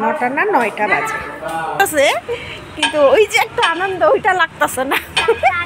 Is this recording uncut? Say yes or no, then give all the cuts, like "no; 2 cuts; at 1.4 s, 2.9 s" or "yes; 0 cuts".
no; 1 cut; at 1.8 s